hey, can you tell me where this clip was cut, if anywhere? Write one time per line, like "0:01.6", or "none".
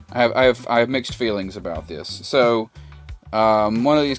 none